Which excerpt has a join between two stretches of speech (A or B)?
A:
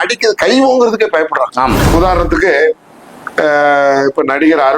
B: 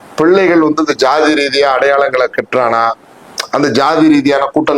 A